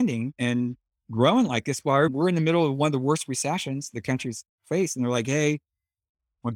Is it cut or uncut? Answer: cut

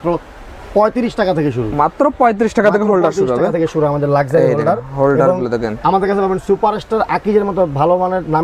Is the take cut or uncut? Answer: uncut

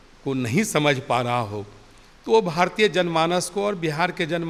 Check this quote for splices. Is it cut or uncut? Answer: uncut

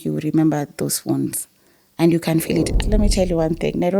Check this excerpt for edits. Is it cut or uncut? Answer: cut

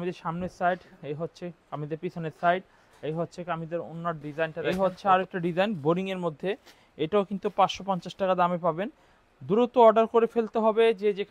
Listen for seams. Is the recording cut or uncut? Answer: cut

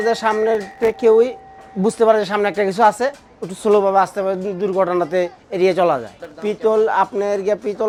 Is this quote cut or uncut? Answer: uncut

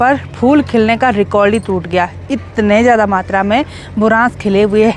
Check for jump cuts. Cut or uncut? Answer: uncut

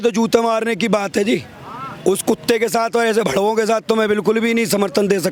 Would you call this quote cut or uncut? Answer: uncut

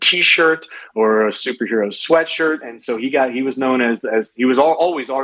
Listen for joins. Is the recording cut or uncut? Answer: uncut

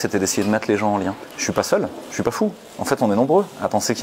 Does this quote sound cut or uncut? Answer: cut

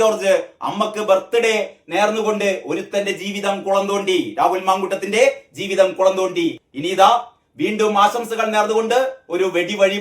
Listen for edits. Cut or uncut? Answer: uncut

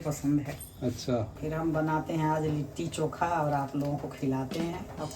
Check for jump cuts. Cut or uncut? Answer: cut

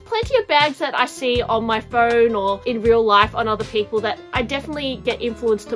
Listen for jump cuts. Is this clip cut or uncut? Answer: uncut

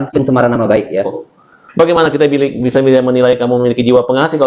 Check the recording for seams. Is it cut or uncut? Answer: cut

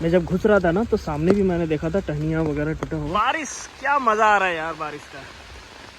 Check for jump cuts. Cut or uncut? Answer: cut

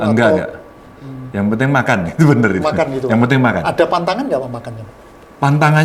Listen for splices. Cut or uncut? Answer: uncut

